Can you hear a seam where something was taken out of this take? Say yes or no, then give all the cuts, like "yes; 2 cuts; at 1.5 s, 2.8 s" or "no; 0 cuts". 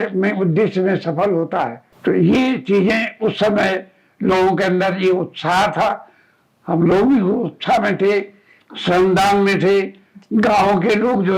no; 0 cuts